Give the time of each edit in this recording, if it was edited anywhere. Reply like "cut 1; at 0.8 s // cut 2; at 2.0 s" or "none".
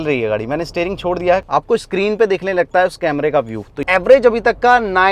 cut 1; at 1.5 s // cut 2; at 3.8 s